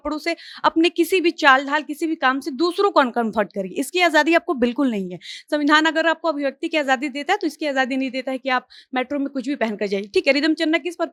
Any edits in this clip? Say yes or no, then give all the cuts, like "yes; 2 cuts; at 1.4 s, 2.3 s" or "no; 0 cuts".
no; 0 cuts